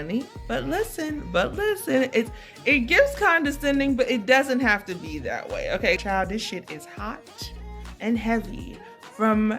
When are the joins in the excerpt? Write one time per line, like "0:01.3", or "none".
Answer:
0:06.0